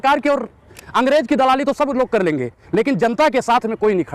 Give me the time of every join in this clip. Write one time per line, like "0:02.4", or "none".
none